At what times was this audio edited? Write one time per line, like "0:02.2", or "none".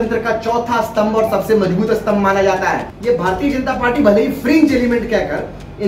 0:02.9